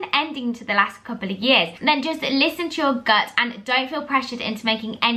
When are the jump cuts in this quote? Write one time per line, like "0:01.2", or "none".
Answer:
0:01.8